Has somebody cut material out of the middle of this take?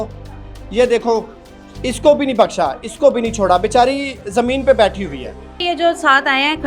yes; 1 cut; at 5.6 s

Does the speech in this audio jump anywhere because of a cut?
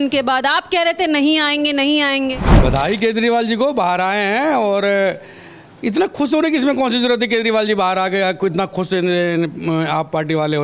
yes; 1 cut; at 2.5 s

